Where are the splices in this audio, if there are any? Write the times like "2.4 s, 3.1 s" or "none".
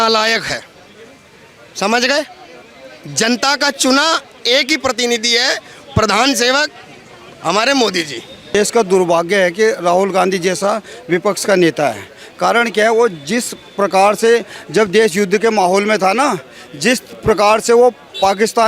8.6 s

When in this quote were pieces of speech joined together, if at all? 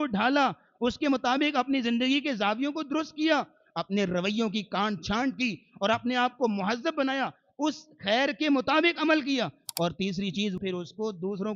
10.6 s

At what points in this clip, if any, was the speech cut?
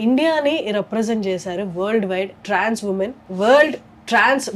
2.4 s, 3.2 s

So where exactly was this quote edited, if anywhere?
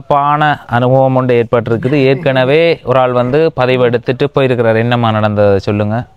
none

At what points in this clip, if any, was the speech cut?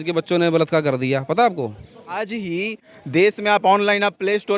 2.2 s

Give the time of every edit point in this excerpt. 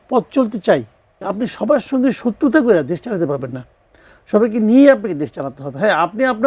1.2 s

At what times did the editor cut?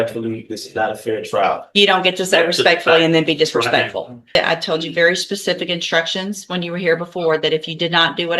4.4 s

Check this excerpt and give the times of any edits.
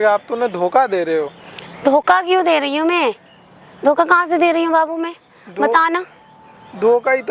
none

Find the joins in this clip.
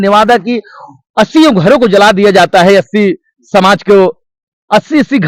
none

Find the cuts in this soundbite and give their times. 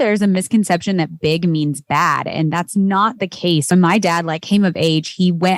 3.7 s

